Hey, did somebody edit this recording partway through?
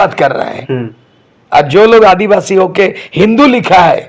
no; 0 cuts

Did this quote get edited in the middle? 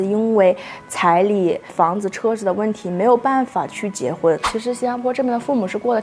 yes; 1 cut; at 4.5 s

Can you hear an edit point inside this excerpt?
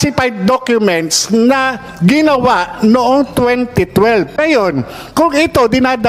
yes; 1 cut; at 4.3 s

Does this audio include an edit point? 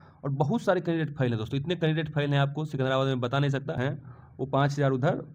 yes; 1 cut; at 3.8 s

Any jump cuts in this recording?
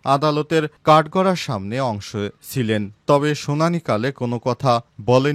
no; 0 cuts

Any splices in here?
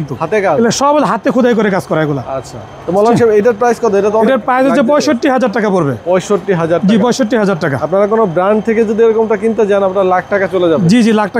no; 0 cuts

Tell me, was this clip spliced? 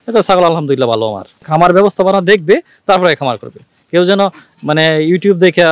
yes; 1 cut; at 1.5 s

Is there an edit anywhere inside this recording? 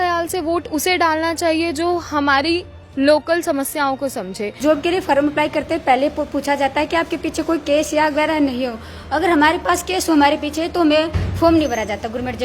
yes; 1 cut; at 4.6 s

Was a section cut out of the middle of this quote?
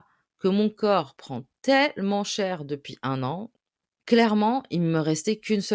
yes; 1 cut; at 3.6 s

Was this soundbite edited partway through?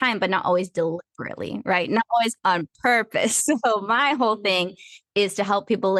no; 0 cuts

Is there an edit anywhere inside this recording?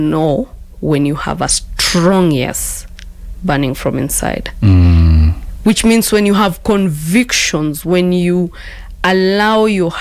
no; 0 cuts

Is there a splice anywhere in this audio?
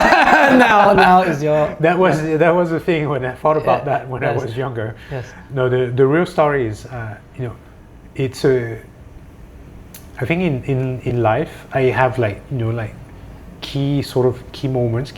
no; 0 cuts

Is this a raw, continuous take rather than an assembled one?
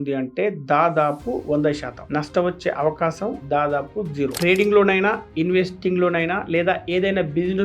no; 1 cut; at 4.3 s

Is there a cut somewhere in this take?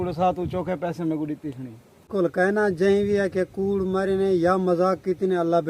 yes; 1 cut; at 2.1 s

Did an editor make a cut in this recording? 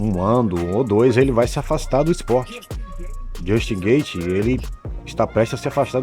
no; 0 cuts

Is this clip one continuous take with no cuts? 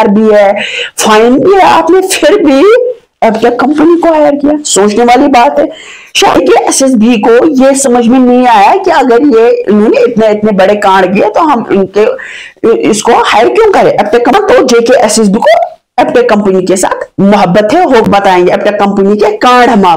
no; 4 cuts; at 6.3 s, 14.3 s, 18.0 s, 19.0 s

